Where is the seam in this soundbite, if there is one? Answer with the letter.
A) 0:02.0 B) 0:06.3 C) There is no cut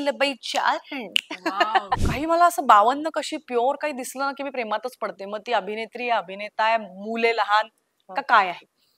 A